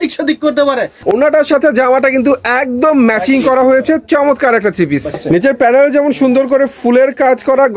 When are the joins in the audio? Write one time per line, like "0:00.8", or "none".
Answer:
0:00.9
0:05.2